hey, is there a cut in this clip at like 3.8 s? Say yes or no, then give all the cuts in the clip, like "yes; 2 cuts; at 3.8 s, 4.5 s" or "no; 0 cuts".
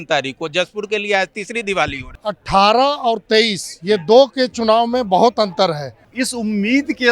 no; 2 cuts; at 2.1 s, 6.1 s